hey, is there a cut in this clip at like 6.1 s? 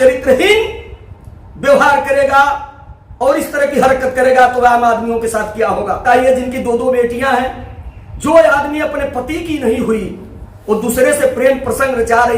yes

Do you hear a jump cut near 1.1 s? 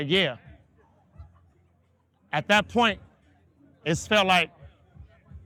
no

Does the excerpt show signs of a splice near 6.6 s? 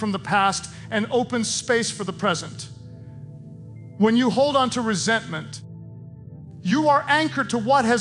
no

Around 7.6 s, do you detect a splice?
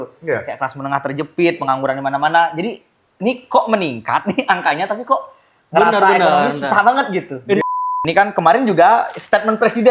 yes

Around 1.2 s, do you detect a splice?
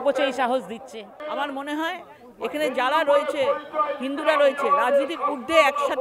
yes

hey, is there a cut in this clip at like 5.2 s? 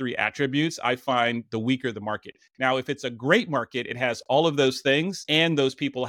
yes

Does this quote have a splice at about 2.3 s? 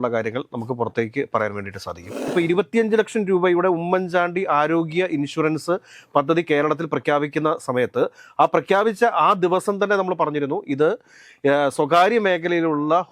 yes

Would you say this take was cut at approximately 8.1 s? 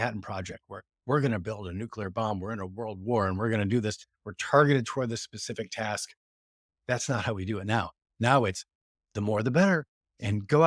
no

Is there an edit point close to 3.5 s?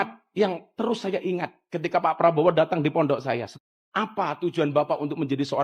yes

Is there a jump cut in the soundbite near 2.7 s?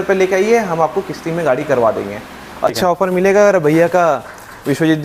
yes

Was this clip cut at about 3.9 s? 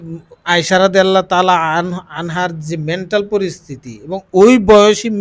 no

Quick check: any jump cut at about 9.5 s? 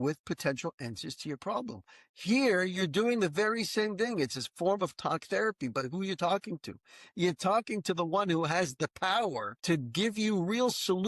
yes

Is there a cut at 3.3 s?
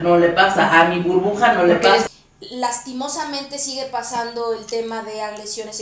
no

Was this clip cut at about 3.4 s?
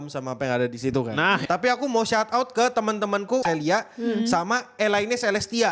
yes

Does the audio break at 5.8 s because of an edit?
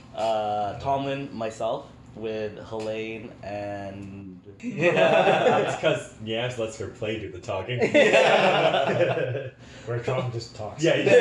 no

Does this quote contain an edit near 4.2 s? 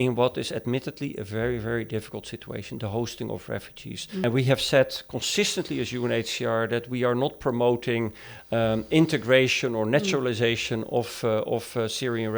yes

